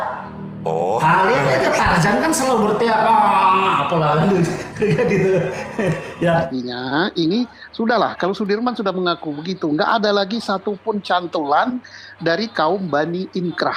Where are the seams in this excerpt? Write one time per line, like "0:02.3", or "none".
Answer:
0:06.5

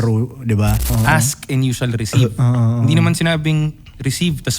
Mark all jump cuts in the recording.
0:00.9

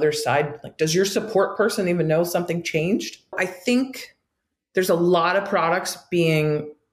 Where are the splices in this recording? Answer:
0:03.4

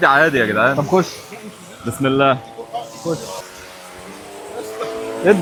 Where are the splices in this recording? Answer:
none

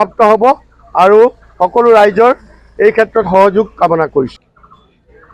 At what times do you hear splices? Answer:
0:04.4

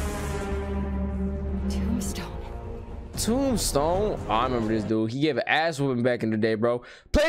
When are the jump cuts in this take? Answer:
0:01.8

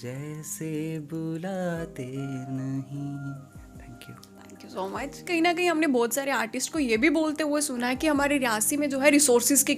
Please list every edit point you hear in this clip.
none

